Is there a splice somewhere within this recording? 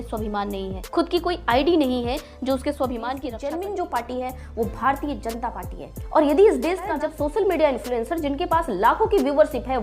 yes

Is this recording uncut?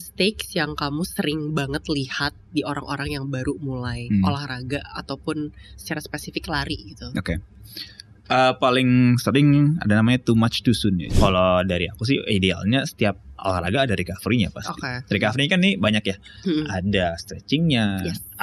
no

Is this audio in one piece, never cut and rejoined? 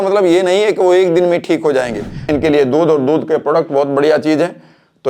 no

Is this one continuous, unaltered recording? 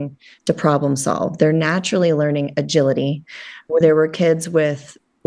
no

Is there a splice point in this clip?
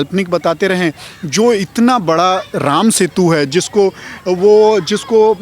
no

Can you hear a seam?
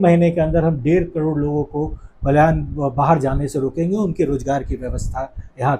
no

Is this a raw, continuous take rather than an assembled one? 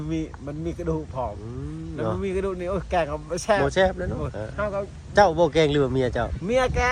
yes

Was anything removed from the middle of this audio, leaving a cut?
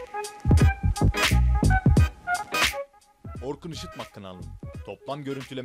yes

